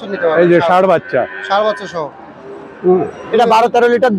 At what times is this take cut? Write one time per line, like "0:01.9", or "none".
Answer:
0:03.2